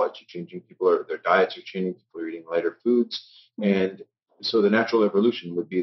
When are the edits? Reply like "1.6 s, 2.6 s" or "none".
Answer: none